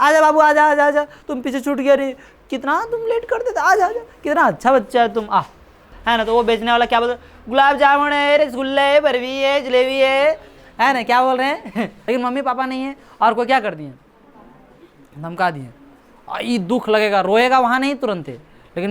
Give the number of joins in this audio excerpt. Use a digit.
2